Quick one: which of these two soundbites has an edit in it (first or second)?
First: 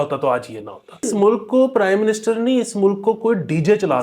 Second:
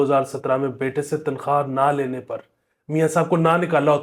first